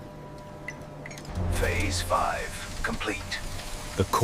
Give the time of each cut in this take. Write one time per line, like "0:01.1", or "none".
0:01.2